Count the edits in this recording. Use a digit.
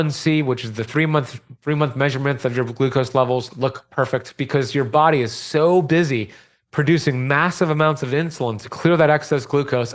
0